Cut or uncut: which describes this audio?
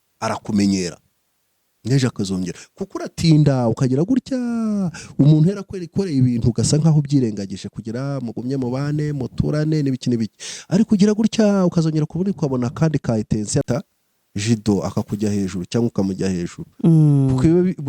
cut